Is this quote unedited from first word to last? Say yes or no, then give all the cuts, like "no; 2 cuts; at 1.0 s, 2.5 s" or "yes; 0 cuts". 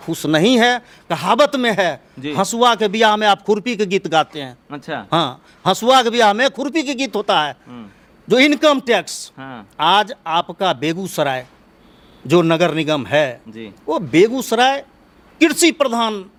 yes; 0 cuts